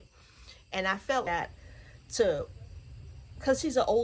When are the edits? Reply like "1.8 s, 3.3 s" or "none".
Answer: 1.3 s